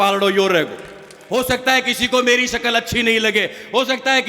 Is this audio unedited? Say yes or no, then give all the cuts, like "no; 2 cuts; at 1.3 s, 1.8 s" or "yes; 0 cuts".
no; 1 cut; at 1.1 s